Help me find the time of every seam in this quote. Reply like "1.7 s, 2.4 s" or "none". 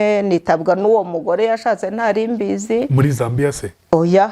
none